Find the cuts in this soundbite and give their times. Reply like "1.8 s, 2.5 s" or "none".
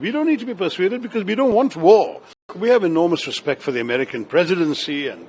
2.5 s